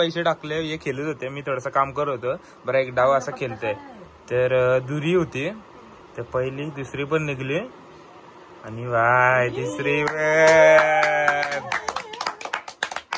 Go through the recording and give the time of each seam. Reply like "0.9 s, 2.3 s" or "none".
none